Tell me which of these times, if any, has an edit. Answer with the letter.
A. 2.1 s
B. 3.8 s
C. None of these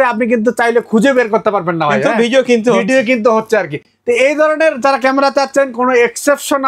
C